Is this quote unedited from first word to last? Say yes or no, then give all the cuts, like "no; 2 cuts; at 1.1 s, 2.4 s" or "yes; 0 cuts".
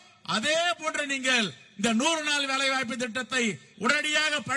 no; 1 cut; at 3.7 s